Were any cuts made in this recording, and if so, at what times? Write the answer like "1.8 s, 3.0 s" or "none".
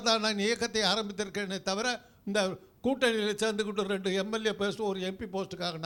none